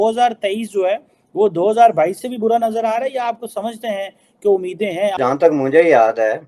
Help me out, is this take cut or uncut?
uncut